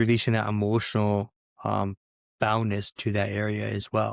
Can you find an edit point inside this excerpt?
no; 0 cuts

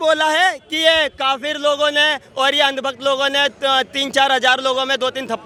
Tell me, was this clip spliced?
no; 0 cuts

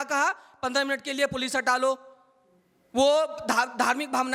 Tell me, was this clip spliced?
no; 0 cuts

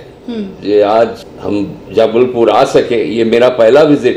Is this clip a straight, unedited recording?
no; 1 cut; at 1.3 s

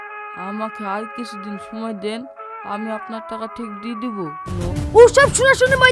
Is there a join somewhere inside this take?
yes; 1 cut; at 4.4 s

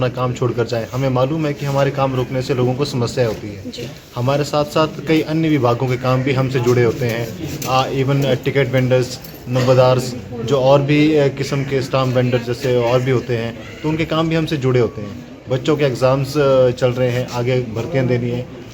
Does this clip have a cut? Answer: no; 0 cuts

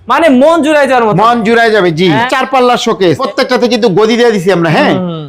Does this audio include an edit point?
yes; 2 cuts; at 2.3 s, 3.2 s

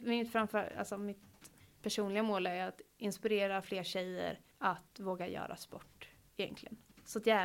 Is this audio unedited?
no; 1 cut; at 4.5 s

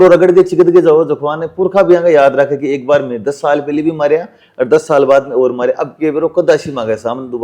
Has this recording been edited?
no; 0 cuts

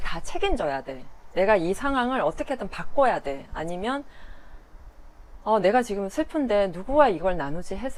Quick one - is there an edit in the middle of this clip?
no; 0 cuts

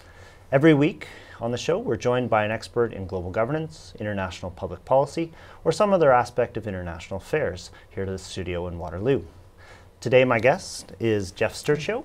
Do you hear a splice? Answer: yes; 1 cut; at 8.0 s

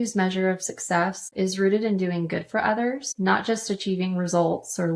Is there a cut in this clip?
yes; 2 cuts; at 1.2 s, 3.1 s

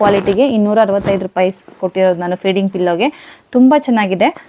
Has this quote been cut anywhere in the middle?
no; 0 cuts

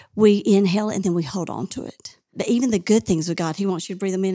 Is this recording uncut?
no; 1 cut; at 2.3 s

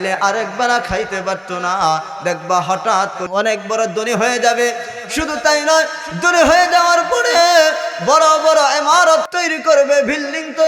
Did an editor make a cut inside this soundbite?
yes; 1 cut; at 3.2 s

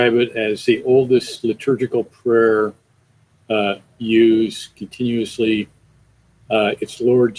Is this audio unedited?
yes; 0 cuts

